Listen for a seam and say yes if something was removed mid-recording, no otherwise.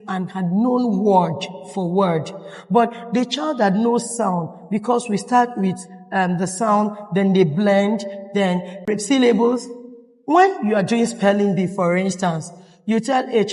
no